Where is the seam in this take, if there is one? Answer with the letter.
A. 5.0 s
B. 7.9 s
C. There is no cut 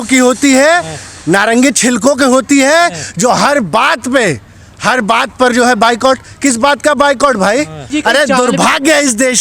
B